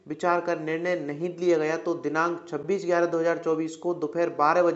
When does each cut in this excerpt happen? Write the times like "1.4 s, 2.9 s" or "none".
2.6 s